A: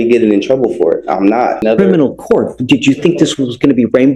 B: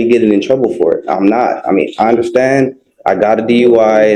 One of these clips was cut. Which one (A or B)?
A